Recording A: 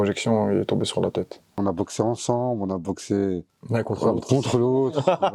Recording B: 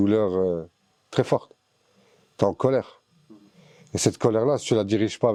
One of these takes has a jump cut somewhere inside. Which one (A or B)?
A